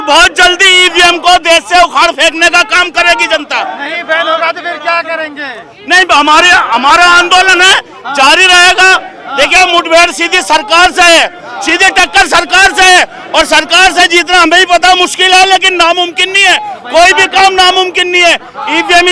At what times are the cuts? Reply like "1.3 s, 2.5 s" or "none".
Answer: none